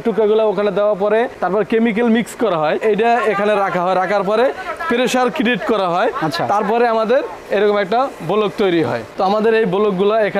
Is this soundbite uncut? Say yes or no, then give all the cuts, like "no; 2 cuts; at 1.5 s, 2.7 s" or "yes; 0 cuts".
no; 2 cuts; at 2.8 s, 9.0 s